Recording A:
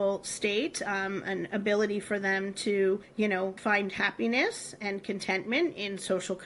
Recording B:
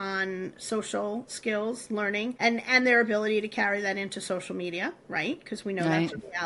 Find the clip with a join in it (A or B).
A